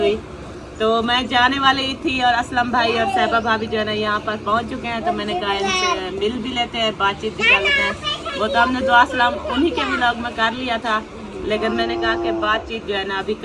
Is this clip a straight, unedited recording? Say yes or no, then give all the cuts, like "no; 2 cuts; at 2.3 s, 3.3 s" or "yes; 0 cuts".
yes; 0 cuts